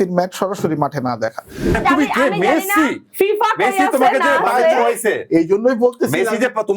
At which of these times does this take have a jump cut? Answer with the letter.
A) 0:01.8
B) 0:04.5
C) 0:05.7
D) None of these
A